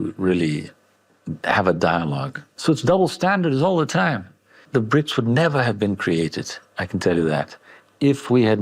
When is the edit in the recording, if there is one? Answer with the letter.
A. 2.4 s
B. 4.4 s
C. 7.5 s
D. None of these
A